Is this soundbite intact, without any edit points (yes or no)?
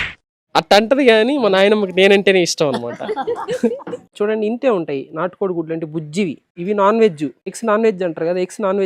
no